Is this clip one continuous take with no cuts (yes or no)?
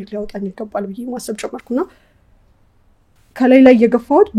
yes